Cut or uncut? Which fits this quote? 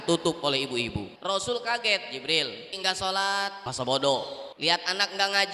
cut